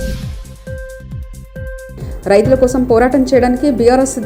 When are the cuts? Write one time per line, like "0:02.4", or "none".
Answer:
0:01.8